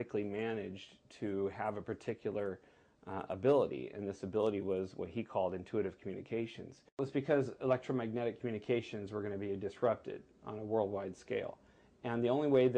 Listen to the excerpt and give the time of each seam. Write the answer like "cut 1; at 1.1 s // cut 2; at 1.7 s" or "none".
cut 1; at 7.0 s